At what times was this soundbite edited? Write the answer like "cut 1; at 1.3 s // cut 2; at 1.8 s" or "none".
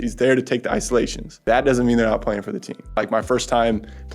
cut 1; at 1.3 s // cut 2; at 2.9 s